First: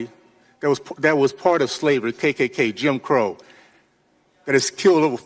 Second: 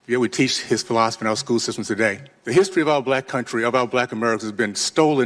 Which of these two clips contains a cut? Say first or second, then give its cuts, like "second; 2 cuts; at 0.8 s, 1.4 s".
second; 1 cut; at 2.3 s